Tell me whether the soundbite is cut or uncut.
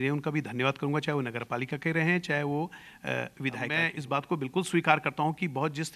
cut